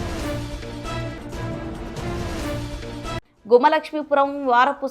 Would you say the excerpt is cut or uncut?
cut